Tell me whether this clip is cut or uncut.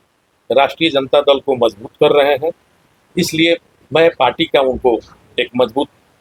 uncut